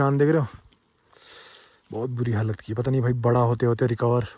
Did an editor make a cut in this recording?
no; 0 cuts

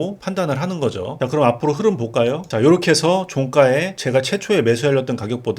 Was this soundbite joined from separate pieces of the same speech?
yes; 1 cut; at 1.1 s

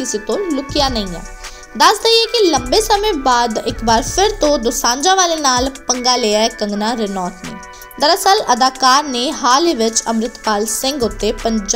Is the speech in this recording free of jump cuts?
no; 1 cut; at 1.2 s

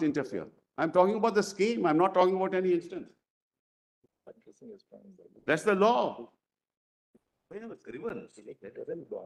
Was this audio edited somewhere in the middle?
no; 0 cuts

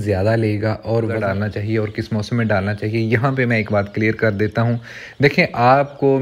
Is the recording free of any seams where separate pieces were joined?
no; 1 cut; at 1.2 s

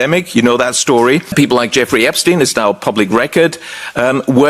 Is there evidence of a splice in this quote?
yes; 1 cut; at 1.3 s

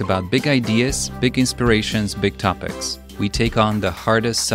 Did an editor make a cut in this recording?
no; 0 cuts

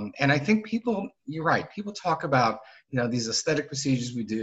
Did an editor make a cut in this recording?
no; 0 cuts

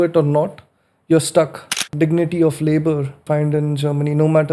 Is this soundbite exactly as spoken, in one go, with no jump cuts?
no; 2 cuts; at 1.8 s, 3.2 s

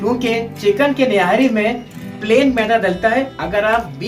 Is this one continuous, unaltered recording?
yes; 0 cuts

